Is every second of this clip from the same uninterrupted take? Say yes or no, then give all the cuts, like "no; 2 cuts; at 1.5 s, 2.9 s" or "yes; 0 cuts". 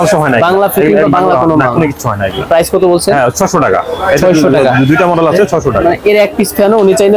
yes; 0 cuts